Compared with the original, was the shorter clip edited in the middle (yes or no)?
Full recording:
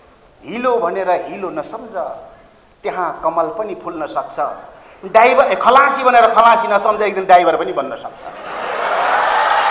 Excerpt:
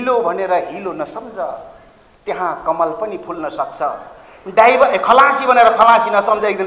no